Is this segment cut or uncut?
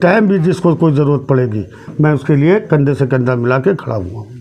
uncut